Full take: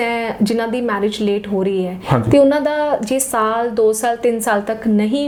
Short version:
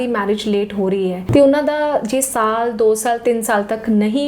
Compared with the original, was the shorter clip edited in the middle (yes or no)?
yes